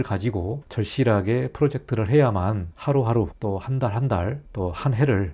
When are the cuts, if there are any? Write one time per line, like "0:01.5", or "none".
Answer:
none